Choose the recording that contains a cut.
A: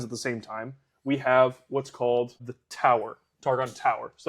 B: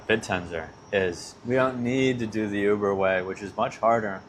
A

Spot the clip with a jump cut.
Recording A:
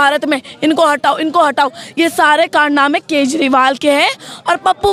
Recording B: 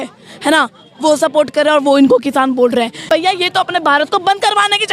B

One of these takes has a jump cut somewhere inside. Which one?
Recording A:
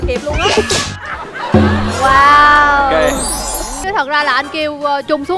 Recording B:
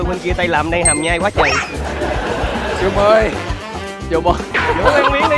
A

